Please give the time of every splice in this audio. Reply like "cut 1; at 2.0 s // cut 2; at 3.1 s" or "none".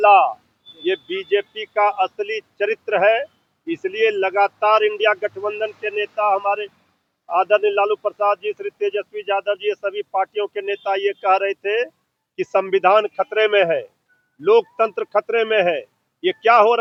none